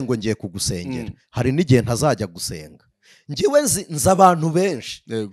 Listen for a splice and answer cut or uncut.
uncut